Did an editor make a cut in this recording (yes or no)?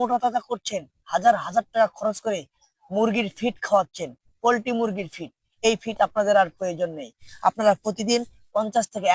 no